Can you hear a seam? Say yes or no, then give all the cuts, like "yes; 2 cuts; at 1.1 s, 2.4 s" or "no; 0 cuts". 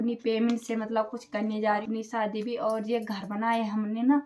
yes; 1 cut; at 1.8 s